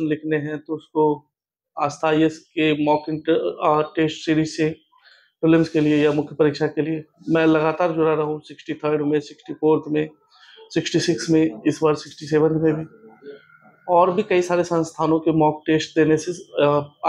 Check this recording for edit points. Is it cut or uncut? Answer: uncut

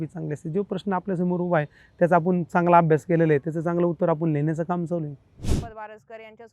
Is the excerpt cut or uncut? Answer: cut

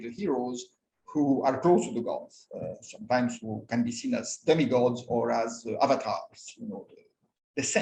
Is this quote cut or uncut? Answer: uncut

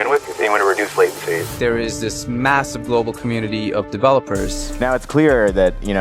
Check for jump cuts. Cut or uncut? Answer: cut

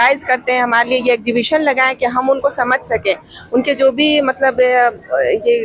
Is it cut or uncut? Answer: uncut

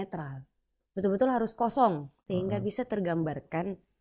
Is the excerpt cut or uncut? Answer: cut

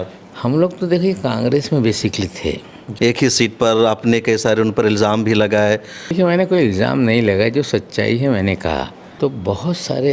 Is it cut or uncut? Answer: cut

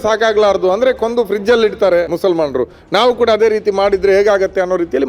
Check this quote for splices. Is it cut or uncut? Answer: cut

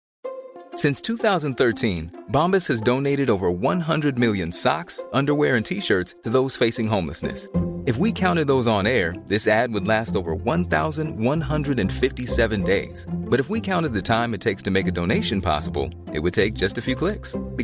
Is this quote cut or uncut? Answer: uncut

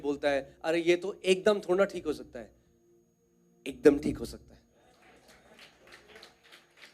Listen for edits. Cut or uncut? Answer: uncut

